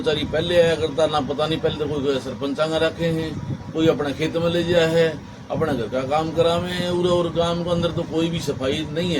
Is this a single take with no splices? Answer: yes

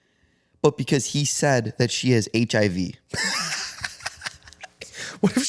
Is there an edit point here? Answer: no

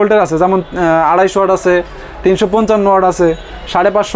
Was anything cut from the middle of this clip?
no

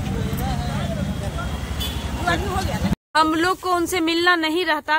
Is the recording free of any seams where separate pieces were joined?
no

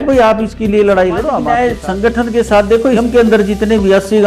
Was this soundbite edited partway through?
yes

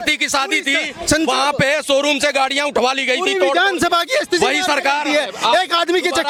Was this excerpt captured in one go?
yes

